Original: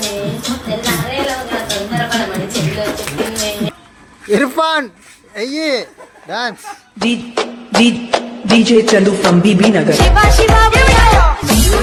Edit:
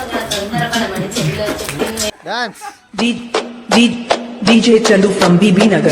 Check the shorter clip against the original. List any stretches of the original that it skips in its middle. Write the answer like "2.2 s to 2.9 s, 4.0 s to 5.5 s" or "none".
3.5 s to 6.2 s

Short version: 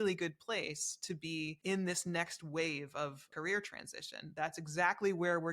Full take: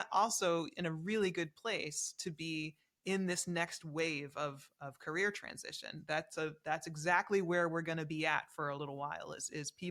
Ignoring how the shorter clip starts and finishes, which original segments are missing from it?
2.7 s to 3.0 s, 4.7 s to 4.9 s, 6.0 s to 6.6 s

